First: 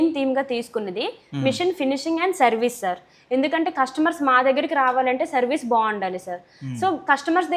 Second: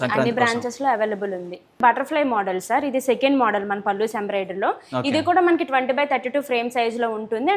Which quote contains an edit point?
second; 1 cut; at 1.8 s

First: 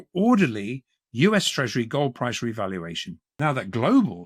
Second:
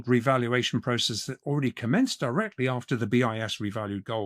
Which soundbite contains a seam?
first; 1 cut; at 3.3 s

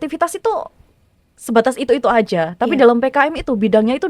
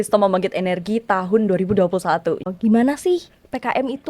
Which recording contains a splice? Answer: second; 1 cut; at 2.4 s

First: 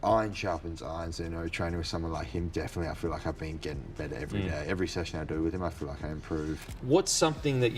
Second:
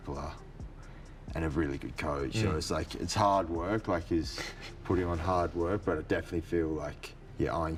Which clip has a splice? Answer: first; 1 cut; at 6.7 s

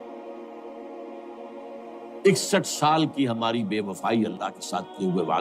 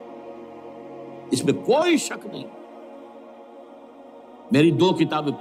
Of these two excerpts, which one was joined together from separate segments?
first; 2 cuts; at 1.3 s, 2.2 s

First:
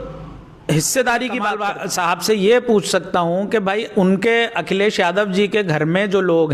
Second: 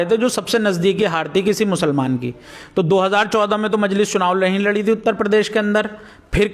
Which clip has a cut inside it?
first; 1 cut; at 1.5 s

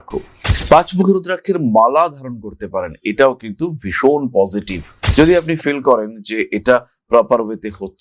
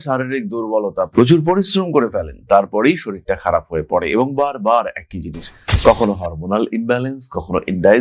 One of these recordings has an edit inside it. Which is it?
first; 1 cut; at 4.9 s

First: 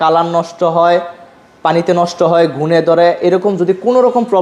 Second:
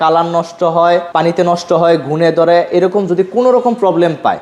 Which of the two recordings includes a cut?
second; 1 cut; at 1.1 s

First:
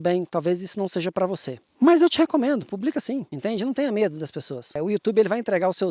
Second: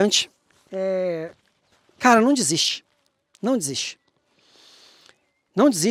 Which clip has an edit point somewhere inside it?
first; 3 cuts; at 1.7 s, 3.3 s, 4.8 s

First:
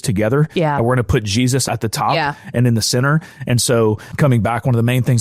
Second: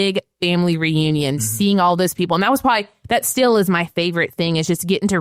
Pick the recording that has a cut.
first; 2 cuts; at 1.6 s, 4.1 s

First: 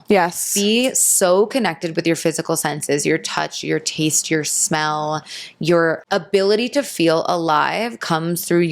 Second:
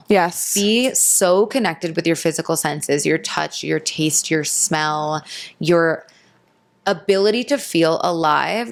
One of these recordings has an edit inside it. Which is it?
first; 1 cut; at 6.0 s

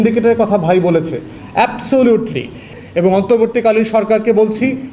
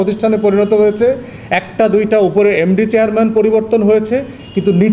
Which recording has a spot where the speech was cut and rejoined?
first; 1 cut; at 2.7 s

